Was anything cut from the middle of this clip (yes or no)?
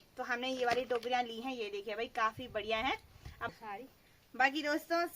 yes